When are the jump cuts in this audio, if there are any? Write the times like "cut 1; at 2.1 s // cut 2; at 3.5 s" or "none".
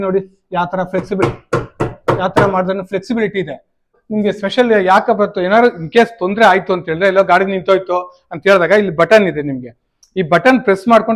cut 1; at 4.0 s